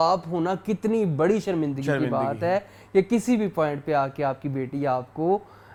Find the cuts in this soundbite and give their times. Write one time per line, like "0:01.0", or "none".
none